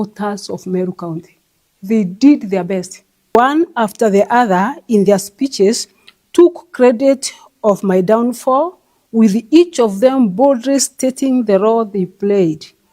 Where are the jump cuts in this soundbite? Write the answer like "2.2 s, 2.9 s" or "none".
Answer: 3.3 s